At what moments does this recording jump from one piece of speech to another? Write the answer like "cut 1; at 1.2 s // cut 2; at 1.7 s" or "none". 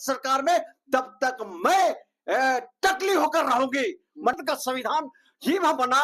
cut 1; at 4.3 s